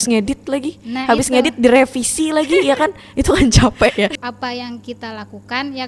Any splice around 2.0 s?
no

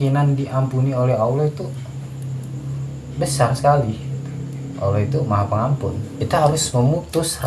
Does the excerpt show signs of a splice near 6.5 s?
yes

